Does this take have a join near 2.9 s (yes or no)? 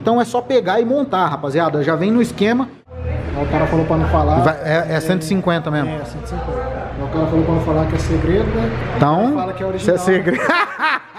yes